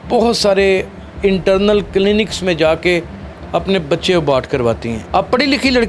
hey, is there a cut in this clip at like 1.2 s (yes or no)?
no